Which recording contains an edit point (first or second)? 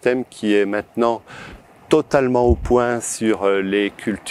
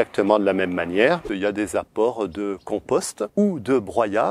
second